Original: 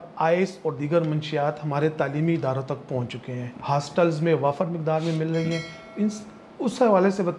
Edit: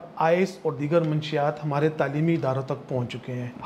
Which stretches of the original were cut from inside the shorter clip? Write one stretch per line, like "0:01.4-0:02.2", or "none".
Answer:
none